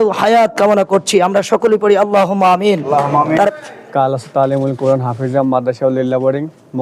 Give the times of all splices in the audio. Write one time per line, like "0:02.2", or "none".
0:03.5